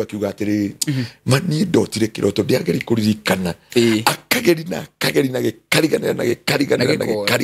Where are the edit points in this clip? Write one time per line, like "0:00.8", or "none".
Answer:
none